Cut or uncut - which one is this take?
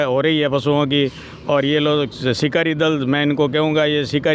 uncut